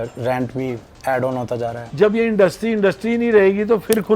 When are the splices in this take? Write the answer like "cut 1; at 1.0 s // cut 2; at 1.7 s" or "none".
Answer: cut 1; at 1.8 s